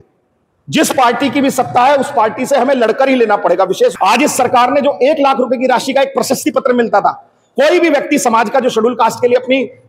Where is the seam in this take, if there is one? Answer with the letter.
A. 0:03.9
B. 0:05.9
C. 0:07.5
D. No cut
A